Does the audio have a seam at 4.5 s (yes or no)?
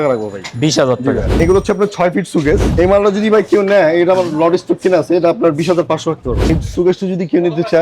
no